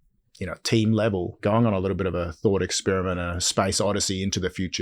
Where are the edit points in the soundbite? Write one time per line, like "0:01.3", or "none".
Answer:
0:01.4